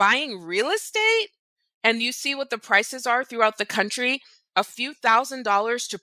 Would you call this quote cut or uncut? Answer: uncut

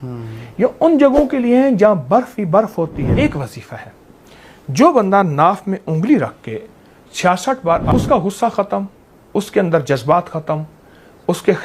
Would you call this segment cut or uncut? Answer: cut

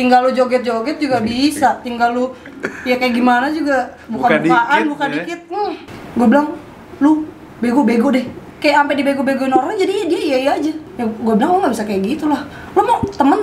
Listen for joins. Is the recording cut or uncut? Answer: cut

